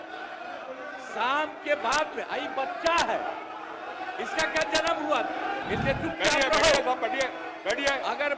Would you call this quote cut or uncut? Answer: cut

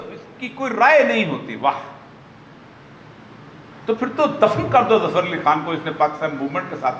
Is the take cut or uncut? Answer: uncut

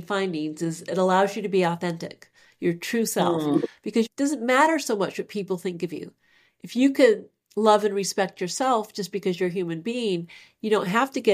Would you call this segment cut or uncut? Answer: cut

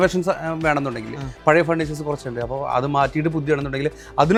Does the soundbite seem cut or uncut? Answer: uncut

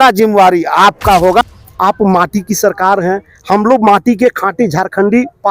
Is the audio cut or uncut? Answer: cut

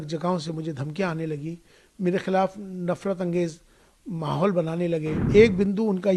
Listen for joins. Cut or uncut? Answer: cut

